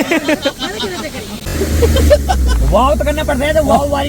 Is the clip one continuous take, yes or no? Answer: no